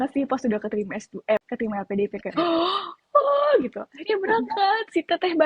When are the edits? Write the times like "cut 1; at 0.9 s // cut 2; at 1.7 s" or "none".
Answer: cut 1; at 1.4 s

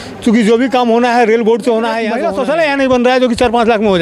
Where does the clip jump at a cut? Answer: cut 1; at 2.2 s

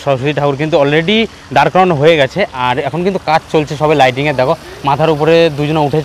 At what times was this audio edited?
none

